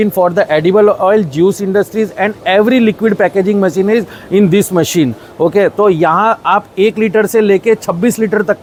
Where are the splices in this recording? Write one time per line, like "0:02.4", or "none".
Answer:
none